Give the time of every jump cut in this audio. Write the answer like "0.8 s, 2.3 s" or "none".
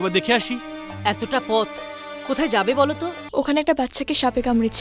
3.1 s